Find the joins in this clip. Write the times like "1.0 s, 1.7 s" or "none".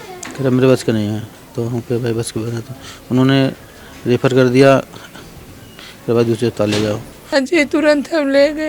7.2 s